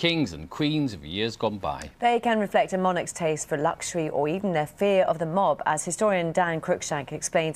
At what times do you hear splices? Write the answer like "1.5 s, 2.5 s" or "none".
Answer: 6.5 s